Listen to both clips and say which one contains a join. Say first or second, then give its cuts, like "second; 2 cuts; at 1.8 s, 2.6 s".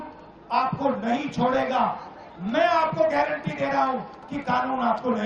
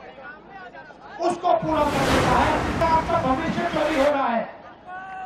second; 1 cut; at 2.8 s